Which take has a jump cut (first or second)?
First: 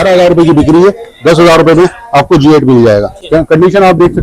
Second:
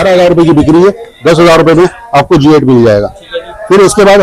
first